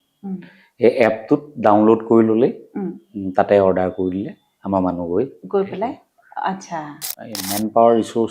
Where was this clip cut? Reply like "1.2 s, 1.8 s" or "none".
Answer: 7.1 s